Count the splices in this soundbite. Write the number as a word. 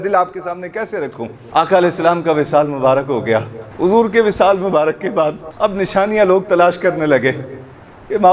three